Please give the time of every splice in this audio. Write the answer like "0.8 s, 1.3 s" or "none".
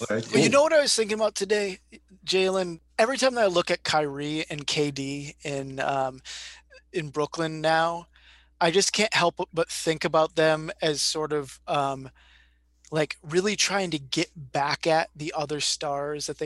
2.8 s